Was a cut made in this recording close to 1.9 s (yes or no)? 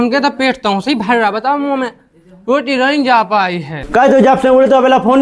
no